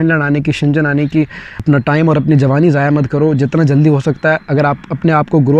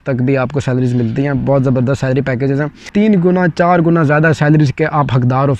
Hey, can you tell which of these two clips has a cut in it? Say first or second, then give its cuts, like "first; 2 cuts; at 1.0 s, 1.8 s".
second; 1 cut; at 2.9 s